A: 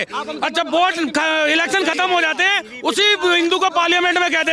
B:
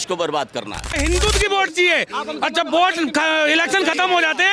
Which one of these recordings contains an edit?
B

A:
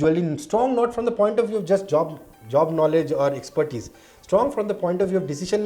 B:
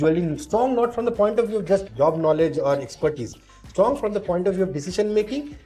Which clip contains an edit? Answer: B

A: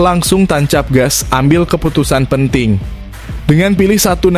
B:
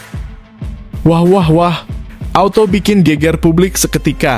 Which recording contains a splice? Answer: B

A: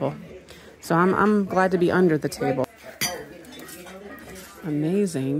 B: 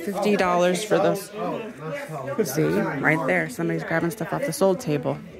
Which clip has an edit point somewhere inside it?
A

